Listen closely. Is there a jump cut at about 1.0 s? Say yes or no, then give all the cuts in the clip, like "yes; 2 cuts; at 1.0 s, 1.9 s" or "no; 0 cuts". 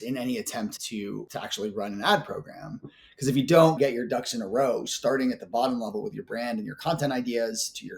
yes; 1 cut; at 1.0 s